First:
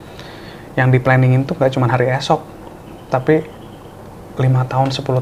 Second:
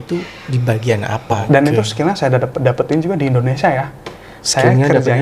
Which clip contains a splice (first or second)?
second